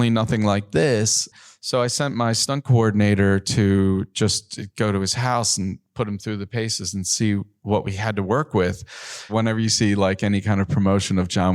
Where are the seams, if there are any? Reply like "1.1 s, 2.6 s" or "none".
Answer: 1.3 s, 2.4 s, 7.5 s, 9.3 s